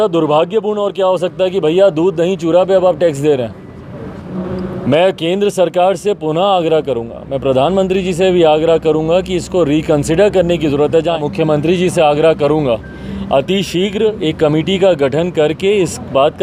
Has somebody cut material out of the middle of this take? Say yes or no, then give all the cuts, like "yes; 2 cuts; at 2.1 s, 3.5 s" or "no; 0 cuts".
yes; 2 cuts; at 4.4 s, 11.2 s